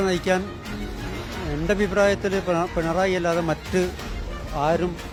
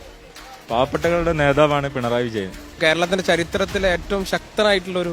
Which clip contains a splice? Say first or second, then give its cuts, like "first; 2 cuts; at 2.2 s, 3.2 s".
second; 1 cut; at 2.8 s